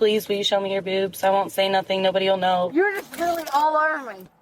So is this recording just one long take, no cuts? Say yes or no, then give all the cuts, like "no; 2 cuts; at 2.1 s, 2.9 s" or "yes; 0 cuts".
no; 1 cut; at 2.7 s